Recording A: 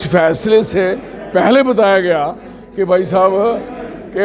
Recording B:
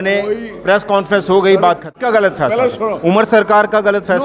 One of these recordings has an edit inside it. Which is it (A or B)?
B